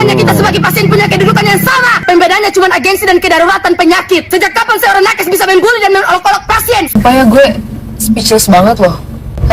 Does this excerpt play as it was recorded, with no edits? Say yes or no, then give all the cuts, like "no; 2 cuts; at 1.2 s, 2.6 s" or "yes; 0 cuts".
no; 1 cut; at 6.9 s